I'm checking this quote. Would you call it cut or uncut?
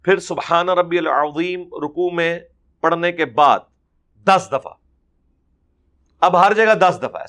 uncut